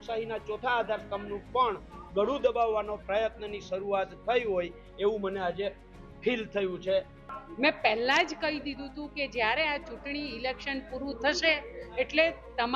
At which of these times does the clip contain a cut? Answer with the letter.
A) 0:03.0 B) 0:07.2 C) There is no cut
B